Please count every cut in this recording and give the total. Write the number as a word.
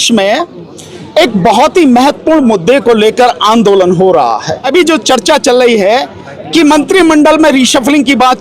one